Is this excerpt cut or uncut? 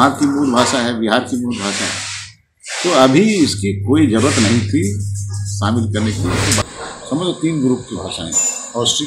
cut